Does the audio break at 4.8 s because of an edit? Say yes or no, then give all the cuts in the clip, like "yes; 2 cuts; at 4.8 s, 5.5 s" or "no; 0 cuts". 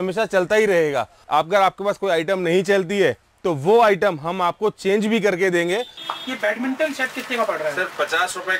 no; 2 cuts; at 1.1 s, 6.0 s